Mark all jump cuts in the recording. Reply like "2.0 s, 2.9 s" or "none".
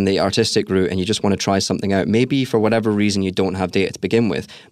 none